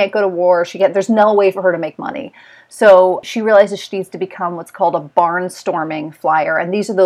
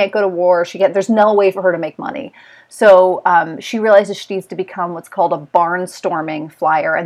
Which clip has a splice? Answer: first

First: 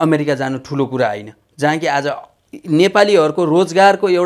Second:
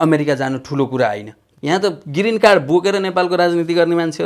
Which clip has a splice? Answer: second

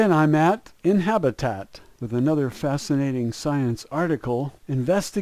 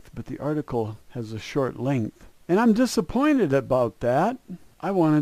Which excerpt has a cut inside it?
second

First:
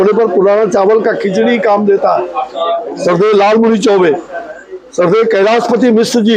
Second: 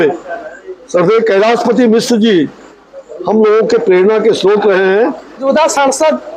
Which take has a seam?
second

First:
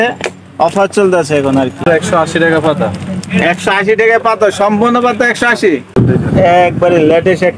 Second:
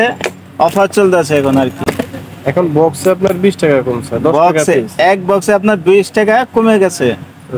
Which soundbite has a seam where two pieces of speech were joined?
first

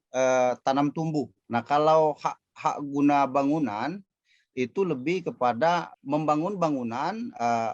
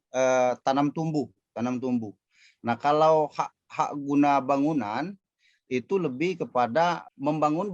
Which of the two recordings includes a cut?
first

